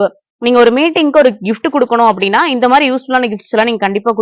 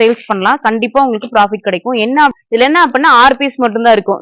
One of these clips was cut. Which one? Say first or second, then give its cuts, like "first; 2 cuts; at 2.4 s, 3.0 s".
second; 1 cut; at 2.4 s